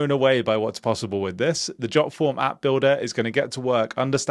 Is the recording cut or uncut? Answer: uncut